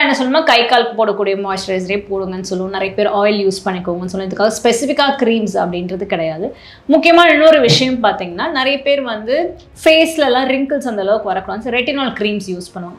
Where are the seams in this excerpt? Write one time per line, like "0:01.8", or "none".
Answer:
none